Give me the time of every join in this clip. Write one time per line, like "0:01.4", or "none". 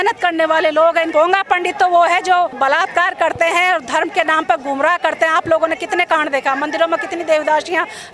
0:01.1
0:02.5

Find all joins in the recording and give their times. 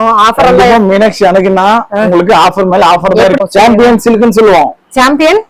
0:03.4

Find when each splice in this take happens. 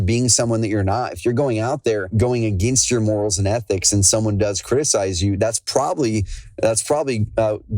0:02.1

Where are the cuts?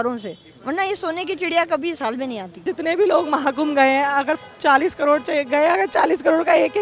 0:02.6

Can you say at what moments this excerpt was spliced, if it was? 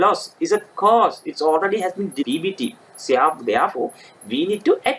0:02.2

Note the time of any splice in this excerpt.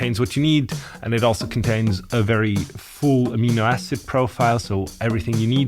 none

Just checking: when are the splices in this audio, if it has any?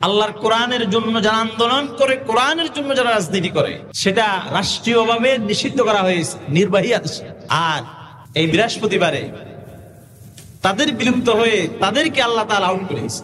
0:03.9
0:07.3
0:08.5

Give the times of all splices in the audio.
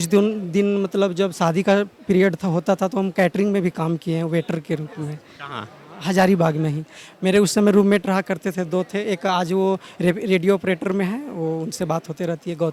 none

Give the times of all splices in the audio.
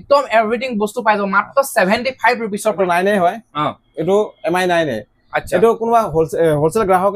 0:02.8

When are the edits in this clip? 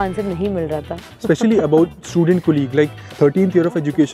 none

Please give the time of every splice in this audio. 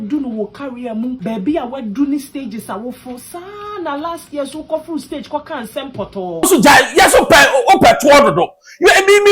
0:01.2
0:06.4

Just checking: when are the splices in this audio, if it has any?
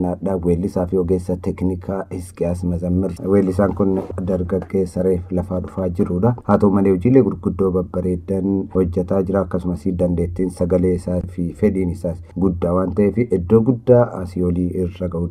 0:03.1

